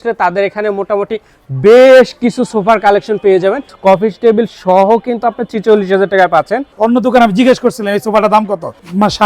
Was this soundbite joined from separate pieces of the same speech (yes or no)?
yes